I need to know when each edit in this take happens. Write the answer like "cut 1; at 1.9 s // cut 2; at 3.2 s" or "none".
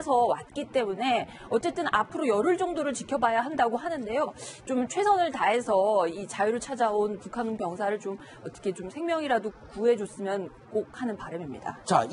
none